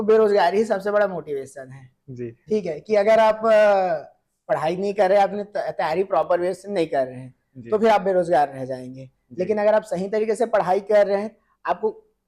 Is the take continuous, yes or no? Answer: yes